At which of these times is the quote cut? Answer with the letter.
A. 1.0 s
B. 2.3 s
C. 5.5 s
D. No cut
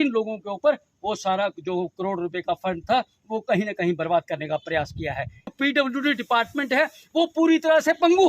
C